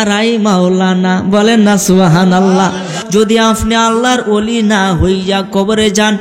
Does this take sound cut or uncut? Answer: cut